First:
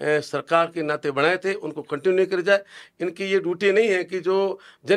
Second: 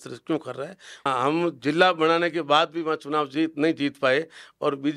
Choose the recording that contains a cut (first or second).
second